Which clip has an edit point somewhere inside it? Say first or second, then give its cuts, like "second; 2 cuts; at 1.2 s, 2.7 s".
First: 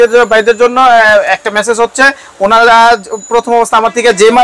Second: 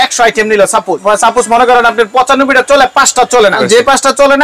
second; 2 cuts; at 0.9 s, 3.6 s